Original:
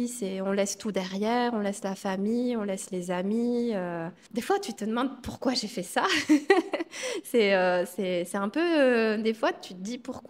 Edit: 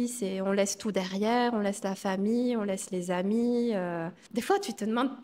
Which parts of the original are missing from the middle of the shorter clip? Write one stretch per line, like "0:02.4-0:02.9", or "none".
none